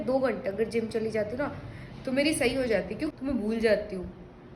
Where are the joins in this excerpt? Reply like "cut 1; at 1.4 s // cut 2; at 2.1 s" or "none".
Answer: cut 1; at 3.1 s